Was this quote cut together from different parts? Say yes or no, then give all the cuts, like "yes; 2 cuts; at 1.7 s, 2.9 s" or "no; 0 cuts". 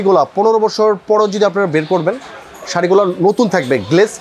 no; 0 cuts